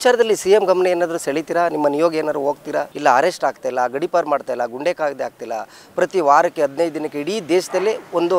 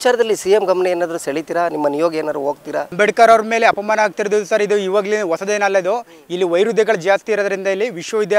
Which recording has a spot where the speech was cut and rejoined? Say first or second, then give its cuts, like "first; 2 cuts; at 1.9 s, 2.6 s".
second; 1 cut; at 2.9 s